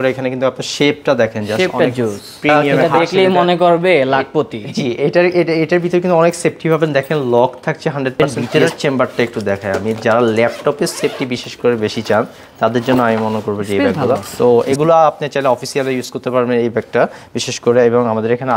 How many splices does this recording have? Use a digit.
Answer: 3